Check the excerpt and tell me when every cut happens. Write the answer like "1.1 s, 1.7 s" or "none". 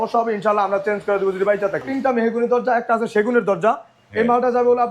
1.9 s